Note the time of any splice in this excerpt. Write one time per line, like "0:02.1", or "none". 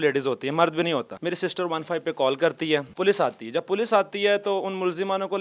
0:01.1
0:02.9